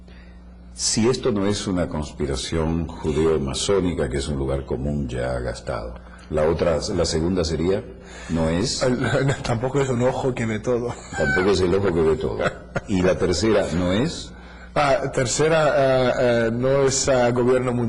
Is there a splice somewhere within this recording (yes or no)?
no